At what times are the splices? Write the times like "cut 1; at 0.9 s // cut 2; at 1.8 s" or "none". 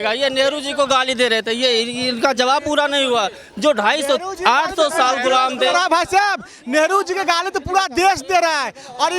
none